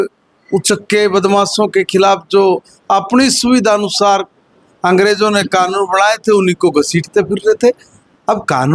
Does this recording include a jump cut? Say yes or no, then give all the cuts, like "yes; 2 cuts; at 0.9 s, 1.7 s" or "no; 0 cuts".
no; 0 cuts